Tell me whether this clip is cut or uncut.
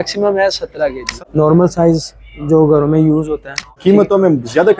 cut